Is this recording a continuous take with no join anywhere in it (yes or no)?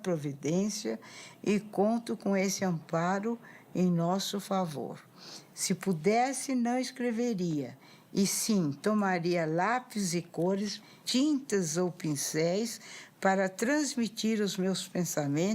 no